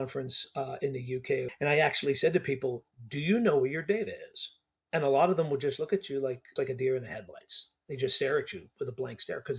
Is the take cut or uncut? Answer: cut